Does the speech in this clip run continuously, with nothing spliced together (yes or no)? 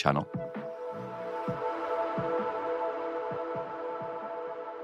yes